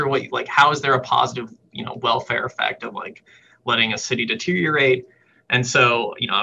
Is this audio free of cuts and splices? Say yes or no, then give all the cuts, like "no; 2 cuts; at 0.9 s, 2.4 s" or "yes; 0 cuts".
yes; 0 cuts